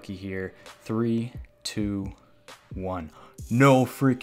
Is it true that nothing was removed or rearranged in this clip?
yes; 0 cuts

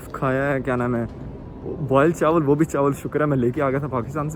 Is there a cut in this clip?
no; 0 cuts

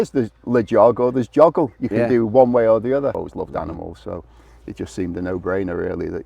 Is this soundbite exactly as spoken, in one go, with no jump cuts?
no; 1 cut; at 3.2 s

